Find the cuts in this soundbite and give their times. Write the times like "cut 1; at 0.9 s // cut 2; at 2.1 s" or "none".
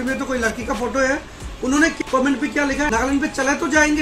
cut 1; at 2.0 s